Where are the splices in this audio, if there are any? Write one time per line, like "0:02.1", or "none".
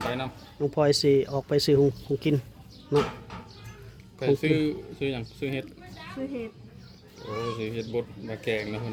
none